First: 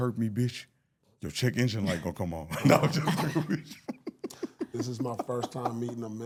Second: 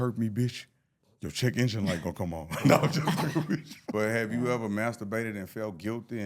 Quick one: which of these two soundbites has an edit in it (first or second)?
second